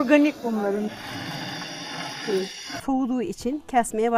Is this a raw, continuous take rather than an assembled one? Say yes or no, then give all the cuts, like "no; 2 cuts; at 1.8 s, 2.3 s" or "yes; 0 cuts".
no; 1 cut; at 2.8 s